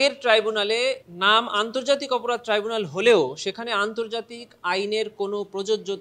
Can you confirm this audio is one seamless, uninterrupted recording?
yes; 0 cuts

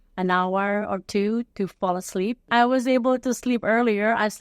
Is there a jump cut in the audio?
yes; 1 cut; at 2.5 s

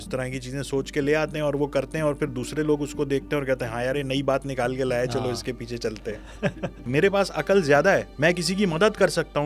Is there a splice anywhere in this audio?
yes; 2 cuts; at 6.8 s, 8.1 s

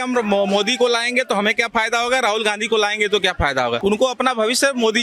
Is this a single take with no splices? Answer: no; 1 cut; at 3.8 s

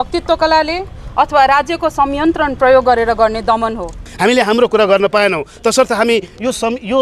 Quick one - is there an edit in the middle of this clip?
yes; 1 cut; at 3.9 s

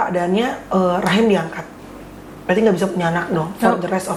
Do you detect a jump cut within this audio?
no; 0 cuts

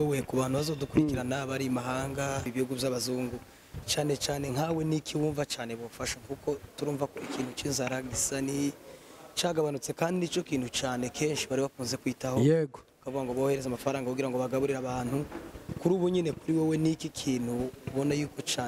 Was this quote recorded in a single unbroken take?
no; 1 cut; at 2.5 s

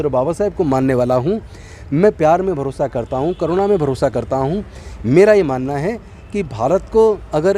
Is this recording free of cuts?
yes; 0 cuts

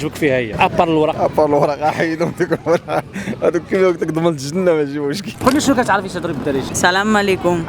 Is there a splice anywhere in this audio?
yes; 3 cuts; at 1.1 s, 5.3 s, 6.7 s

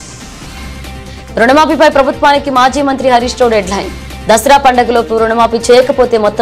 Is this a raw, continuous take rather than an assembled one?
yes; 0 cuts

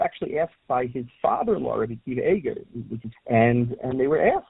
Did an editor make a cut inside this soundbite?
yes; 1 cut; at 3.1 s

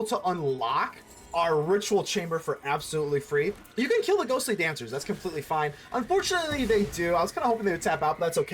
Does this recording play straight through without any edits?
no; 1 cut; at 3.6 s

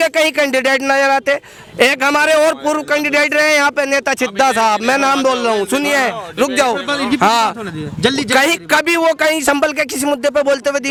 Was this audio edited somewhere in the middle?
no; 0 cuts

